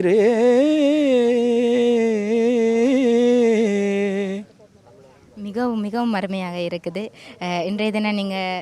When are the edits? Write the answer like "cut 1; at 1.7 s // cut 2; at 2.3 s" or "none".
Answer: none